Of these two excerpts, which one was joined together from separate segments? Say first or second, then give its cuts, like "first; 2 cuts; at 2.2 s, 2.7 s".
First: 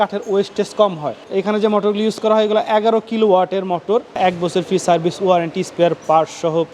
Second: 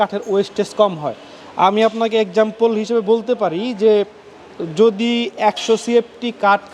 first; 2 cuts; at 1.3 s, 4.2 s